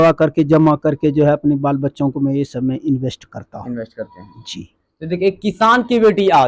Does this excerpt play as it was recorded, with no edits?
yes; 0 cuts

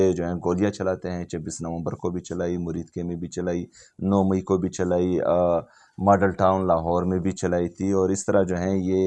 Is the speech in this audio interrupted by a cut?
no; 0 cuts

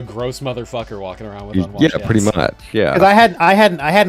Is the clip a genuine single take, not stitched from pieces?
yes; 0 cuts

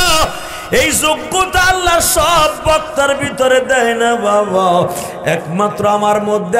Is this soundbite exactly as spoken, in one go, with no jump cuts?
yes; 0 cuts

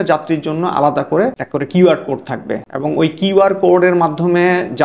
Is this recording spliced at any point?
yes; 2 cuts; at 1.4 s, 2.7 s

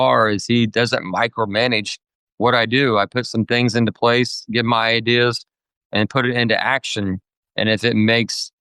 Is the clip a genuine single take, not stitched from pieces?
yes; 0 cuts

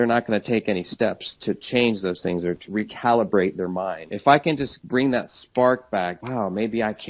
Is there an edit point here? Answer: yes; 4 cuts; at 2.7 s, 4.1 s, 4.7 s, 6.2 s

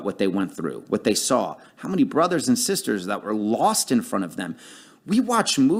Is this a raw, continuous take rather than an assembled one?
yes; 0 cuts

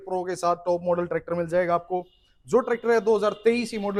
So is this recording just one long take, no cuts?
yes; 0 cuts

